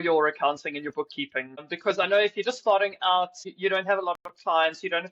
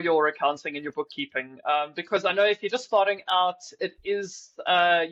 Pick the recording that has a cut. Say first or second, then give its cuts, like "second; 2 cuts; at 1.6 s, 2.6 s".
first; 2 cuts; at 1.6 s, 3.4 s